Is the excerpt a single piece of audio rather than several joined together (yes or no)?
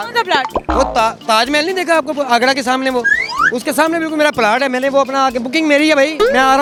yes